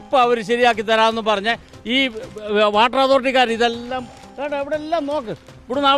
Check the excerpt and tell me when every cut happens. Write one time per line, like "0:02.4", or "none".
none